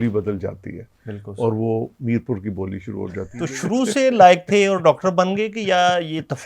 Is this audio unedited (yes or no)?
no